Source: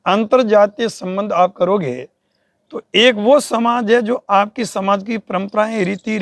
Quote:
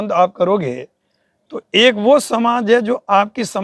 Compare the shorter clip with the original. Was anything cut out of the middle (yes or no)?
no